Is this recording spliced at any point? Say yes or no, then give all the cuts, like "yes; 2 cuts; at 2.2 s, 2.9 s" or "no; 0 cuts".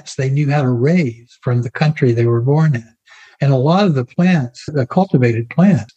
yes; 1 cut; at 4.6 s